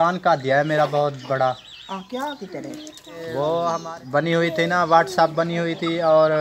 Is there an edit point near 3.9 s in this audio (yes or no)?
yes